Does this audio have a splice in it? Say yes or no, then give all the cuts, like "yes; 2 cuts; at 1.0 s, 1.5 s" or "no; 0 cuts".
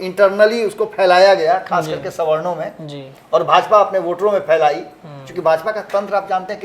no; 0 cuts